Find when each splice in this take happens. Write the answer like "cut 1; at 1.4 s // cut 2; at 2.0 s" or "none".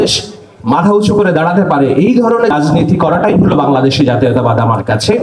cut 1; at 2.5 s